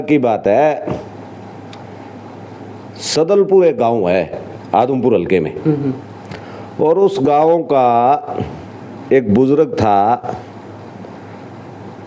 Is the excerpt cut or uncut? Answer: uncut